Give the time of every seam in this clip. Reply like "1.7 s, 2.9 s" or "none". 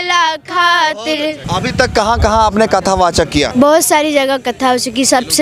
1.4 s, 3.5 s